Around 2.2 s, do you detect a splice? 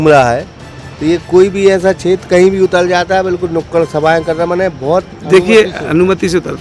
no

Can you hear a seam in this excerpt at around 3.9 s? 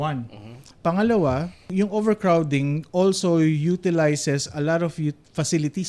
no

